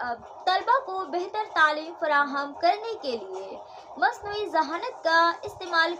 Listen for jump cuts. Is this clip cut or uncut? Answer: uncut